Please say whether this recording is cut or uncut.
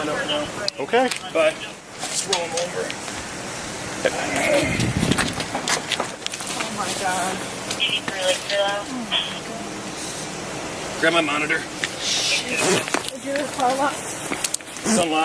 cut